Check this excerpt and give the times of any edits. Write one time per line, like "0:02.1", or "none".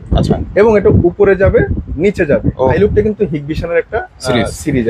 0:02.7